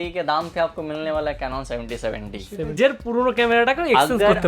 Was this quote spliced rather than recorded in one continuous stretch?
yes; 1 cut; at 2.8 s

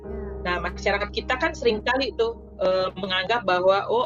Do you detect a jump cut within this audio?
no; 0 cuts

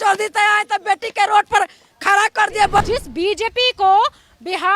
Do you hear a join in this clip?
yes; 1 cut; at 2.8 s

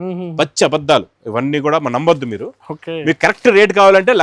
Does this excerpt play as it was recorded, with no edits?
yes; 0 cuts

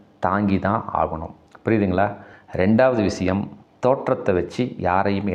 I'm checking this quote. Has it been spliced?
no; 0 cuts

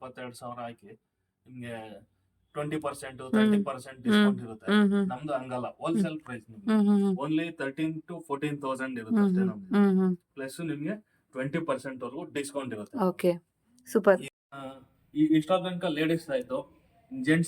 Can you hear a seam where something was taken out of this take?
yes; 1 cut; at 14.3 s

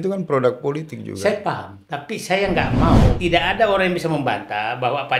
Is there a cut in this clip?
yes; 1 cut; at 3.2 s

